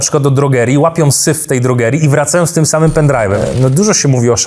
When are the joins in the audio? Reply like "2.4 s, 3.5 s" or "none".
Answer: 3.4 s